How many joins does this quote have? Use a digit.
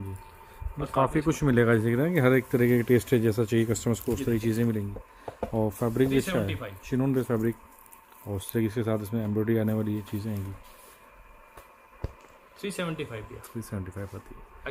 0